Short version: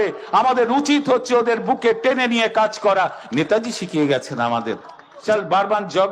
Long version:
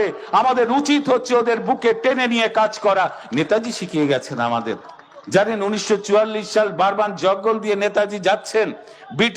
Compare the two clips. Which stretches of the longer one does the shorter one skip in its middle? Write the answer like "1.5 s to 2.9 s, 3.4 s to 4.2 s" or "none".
5.1 s to 6.4 s